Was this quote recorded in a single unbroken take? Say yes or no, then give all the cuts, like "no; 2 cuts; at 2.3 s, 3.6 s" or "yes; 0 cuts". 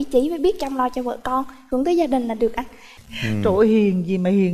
yes; 0 cuts